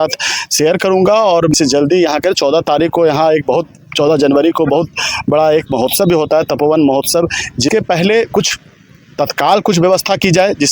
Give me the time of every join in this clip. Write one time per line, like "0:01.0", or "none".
0:01.5
0:07.7